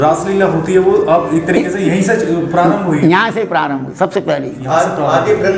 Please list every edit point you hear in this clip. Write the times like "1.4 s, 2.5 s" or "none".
none